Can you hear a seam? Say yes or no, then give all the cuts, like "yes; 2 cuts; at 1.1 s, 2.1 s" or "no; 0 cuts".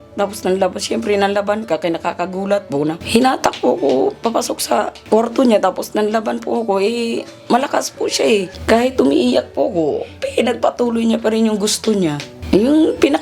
yes; 4 cuts; at 3.0 s, 5.0 s, 8.5 s, 12.3 s